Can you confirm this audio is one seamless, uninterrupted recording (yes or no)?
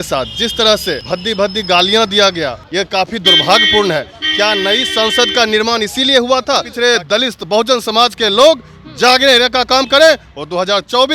no